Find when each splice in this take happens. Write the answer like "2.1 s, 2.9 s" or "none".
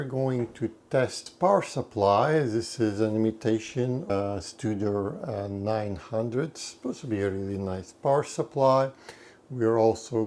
1.2 s, 4.1 s